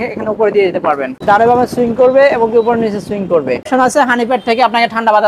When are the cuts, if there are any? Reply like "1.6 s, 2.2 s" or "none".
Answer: 1.2 s, 3.7 s